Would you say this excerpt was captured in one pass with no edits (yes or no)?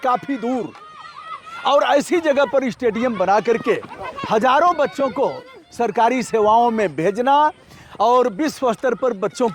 yes